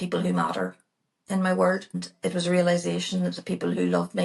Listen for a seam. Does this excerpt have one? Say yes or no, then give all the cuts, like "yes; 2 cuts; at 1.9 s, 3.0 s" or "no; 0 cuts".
yes; 1 cut; at 2.0 s